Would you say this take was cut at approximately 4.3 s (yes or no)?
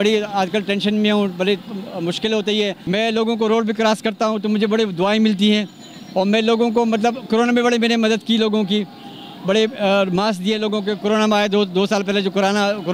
no